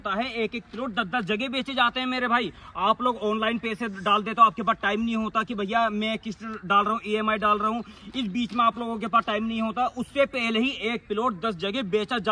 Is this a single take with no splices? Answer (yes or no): yes